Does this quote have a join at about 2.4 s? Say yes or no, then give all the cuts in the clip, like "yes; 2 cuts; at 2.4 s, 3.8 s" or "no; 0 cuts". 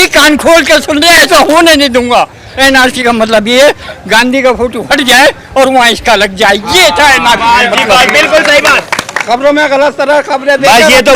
yes; 2 cuts; at 2.4 s, 9.1 s